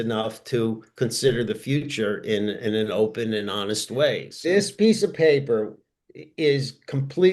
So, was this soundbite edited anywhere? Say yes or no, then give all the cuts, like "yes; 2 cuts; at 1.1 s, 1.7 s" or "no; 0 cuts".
yes; 1 cut; at 4.3 s